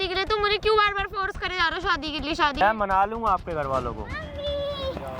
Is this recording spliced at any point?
yes; 1 cut; at 2.6 s

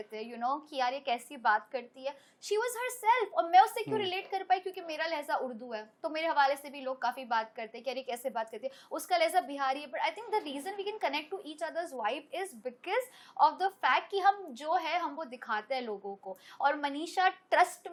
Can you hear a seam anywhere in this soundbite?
no; 0 cuts

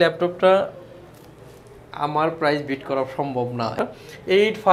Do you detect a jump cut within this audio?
yes; 1 cut; at 3.8 s

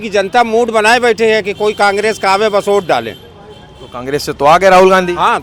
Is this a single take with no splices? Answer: yes; 0 cuts

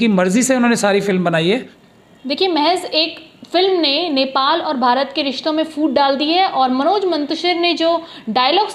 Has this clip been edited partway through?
no; 0 cuts

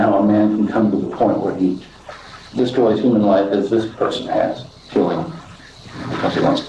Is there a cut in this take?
yes; 1 cut; at 4.8 s

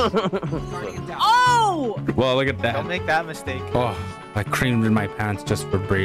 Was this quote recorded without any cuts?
no; 2 cuts; at 1.9 s, 3.6 s

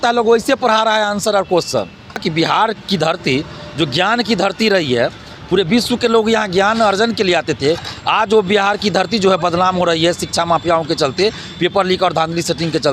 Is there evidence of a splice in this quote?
yes; 1 cut; at 2.2 s

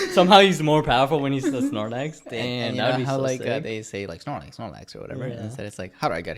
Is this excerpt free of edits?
yes; 0 cuts

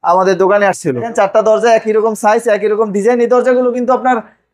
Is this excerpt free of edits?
no; 1 cut; at 1.1 s

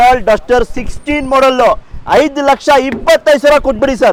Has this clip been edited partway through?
no; 0 cuts

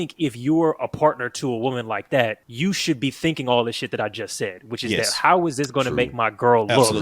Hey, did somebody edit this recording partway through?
yes; 1 cut; at 2.4 s

